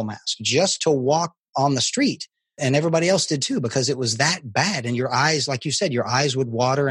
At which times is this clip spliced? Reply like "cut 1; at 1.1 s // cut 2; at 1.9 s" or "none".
cut 1; at 1.5 s // cut 2; at 2.6 s